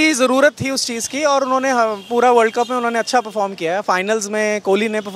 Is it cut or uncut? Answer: uncut